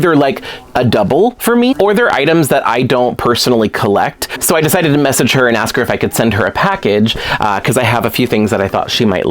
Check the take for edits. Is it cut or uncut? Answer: cut